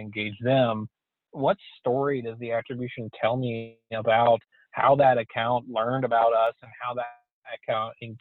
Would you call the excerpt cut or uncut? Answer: cut